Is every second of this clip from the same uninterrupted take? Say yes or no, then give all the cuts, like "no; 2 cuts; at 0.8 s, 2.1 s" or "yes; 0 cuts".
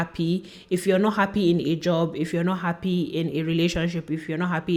yes; 0 cuts